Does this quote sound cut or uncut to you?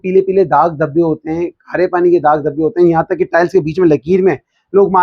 uncut